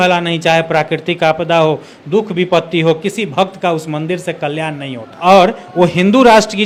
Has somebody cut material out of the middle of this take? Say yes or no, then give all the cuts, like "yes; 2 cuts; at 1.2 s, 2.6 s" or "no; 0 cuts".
no; 0 cuts